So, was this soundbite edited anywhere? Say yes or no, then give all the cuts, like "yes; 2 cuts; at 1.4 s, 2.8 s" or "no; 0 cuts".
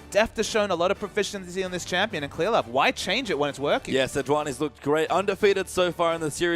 yes; 1 cut; at 4.8 s